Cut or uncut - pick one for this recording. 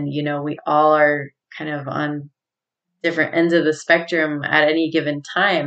uncut